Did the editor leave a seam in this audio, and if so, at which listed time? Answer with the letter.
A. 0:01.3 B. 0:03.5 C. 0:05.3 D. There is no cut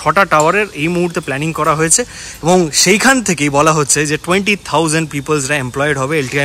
D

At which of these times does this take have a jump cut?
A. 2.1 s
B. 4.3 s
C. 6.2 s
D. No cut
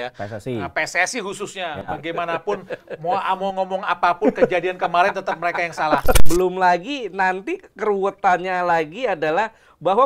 C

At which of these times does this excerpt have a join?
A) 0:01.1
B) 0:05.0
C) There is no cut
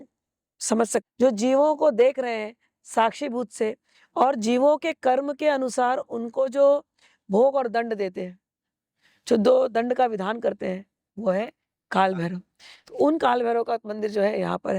A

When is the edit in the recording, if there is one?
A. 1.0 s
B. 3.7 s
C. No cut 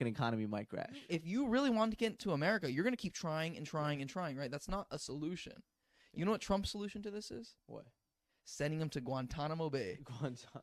A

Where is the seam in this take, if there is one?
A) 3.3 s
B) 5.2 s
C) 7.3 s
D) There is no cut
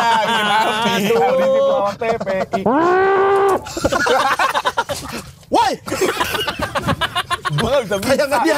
B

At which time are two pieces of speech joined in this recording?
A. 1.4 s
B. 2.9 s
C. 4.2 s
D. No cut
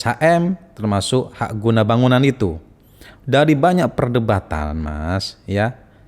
D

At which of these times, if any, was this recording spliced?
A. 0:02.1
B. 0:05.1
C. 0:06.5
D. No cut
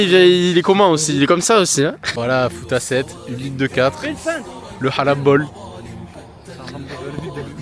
A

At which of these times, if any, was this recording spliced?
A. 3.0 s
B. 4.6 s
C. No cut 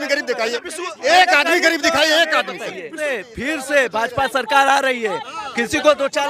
A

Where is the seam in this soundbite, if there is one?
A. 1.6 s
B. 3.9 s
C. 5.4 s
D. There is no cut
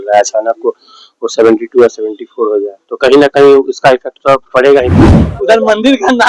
C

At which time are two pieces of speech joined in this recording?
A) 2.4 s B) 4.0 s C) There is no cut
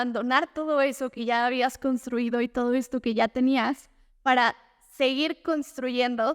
C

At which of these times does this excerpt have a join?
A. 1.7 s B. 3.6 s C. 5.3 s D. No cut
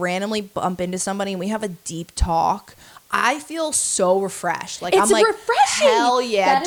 D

